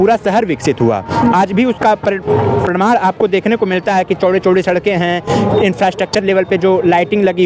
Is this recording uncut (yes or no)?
yes